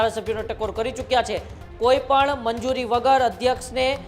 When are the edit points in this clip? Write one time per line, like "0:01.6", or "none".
0:01.6

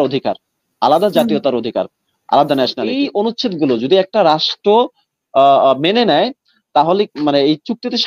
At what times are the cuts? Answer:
0:02.8

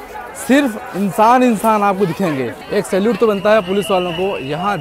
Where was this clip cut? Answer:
0:02.6

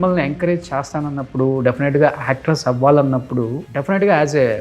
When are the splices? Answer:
0:03.7

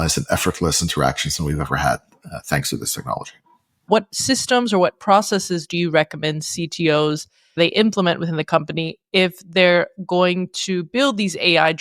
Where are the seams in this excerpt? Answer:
0:03.9
0:07.6

